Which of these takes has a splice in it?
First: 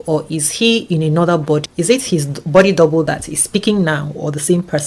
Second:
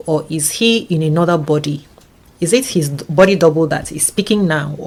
first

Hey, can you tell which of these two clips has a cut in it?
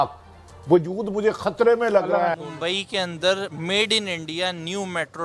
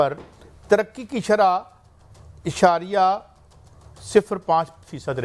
first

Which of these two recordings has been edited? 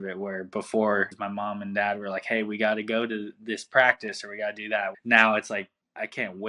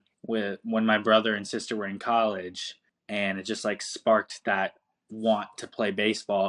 first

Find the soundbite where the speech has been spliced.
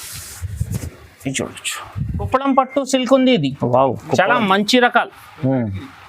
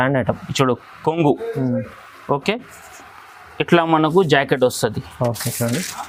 first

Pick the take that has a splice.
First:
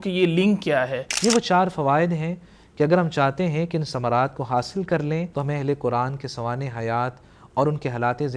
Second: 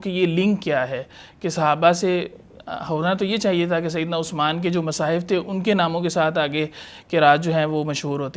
first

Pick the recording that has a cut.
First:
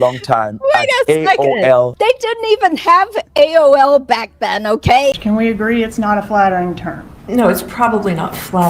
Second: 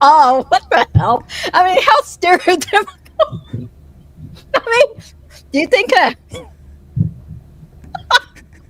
first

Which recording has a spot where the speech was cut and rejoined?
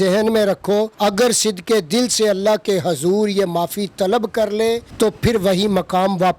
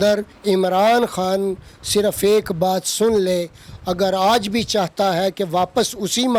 first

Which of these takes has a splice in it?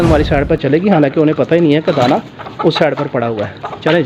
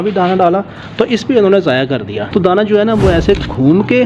second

